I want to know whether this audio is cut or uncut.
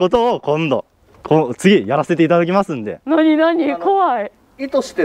uncut